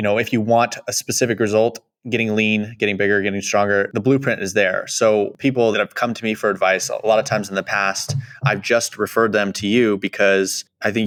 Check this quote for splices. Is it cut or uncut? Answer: uncut